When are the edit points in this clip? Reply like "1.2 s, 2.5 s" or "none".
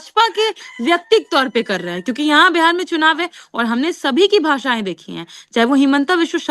none